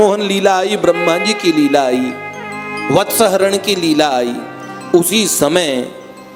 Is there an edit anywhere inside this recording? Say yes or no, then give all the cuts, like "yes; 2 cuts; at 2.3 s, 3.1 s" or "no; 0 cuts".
no; 0 cuts